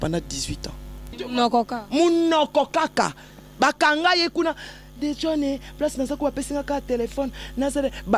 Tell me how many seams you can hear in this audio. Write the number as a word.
one